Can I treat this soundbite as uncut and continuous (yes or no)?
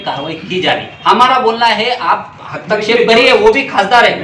yes